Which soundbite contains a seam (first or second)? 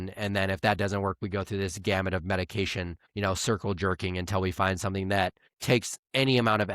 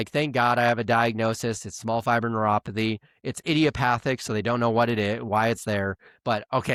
first